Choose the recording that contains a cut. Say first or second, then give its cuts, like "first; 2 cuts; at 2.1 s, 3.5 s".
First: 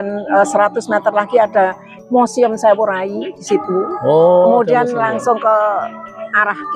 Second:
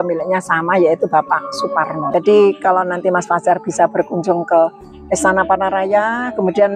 second; 1 cut; at 2.0 s